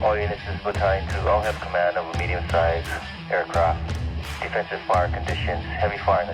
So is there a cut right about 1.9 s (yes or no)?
yes